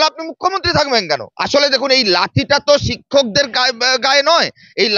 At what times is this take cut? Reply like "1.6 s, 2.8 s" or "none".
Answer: 1.3 s